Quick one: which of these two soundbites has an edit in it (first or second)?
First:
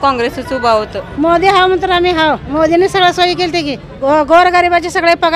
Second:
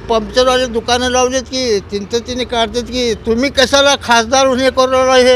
first